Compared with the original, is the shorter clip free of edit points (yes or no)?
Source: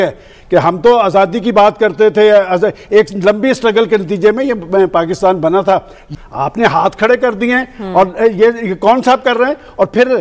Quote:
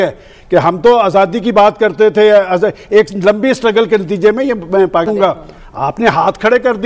no